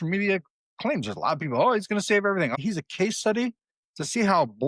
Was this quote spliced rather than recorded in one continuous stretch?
yes; 1 cut; at 2.5 s

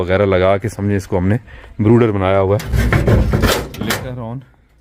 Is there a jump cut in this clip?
no; 0 cuts

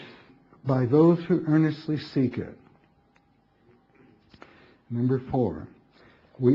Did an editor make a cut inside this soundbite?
yes; 1 cut; at 4.0 s

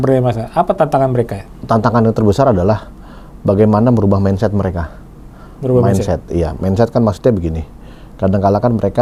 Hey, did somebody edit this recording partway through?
no; 0 cuts

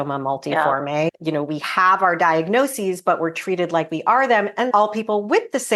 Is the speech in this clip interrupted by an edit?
yes; 2 cuts; at 1.2 s, 4.7 s

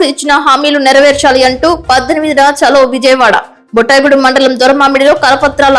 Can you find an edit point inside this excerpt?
no; 0 cuts

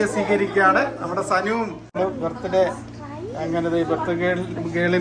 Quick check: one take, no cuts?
no; 1 cut; at 1.8 s

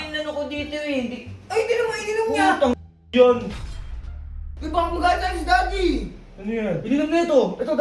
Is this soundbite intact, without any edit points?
no; 1 cut; at 4.1 s

